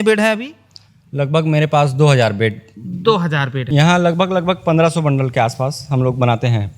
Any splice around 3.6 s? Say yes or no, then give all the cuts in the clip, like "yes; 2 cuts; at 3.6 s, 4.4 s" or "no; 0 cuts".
yes; 1 cut; at 3.6 s